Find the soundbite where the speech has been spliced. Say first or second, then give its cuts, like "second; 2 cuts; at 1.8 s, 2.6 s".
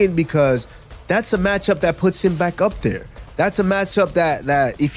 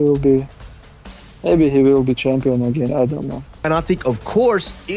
second; 1 cut; at 3.5 s